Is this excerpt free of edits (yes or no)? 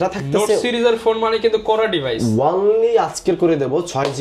yes